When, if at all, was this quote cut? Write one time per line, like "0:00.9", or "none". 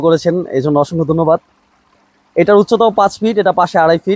none